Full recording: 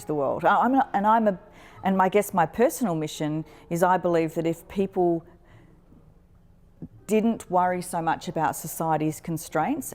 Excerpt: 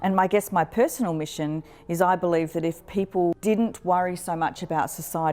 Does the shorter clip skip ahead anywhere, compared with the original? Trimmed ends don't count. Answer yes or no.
yes